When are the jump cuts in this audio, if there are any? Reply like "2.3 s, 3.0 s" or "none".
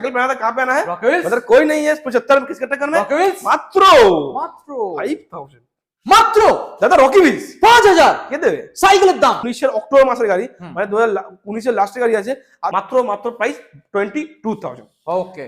9.5 s, 12.6 s